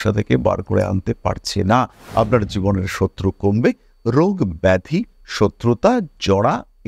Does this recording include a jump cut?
yes; 1 cut; at 2.0 s

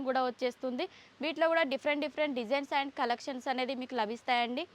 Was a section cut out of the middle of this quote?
no; 0 cuts

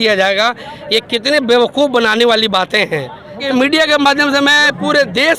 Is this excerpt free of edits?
no; 1 cut; at 3.4 s

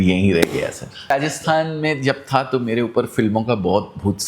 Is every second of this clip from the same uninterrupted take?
no; 1 cut; at 1.1 s

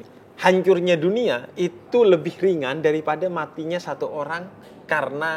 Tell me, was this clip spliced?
no; 0 cuts

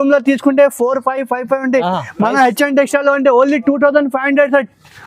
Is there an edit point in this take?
no; 0 cuts

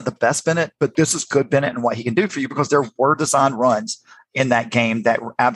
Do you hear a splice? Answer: yes; 1 cut; at 0.9 s

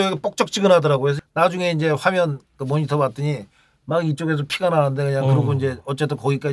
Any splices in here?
yes; 1 cut; at 1.2 s

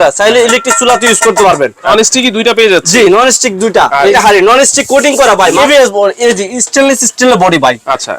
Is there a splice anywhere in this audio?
yes; 3 cuts; at 1.9 s, 4.1 s, 5.6 s

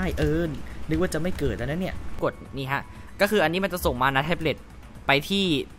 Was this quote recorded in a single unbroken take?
no; 1 cut; at 2.2 s

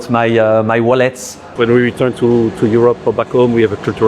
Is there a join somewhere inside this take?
yes; 1 cut; at 1.4 s

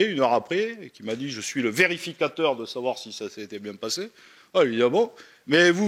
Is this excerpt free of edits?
yes; 0 cuts

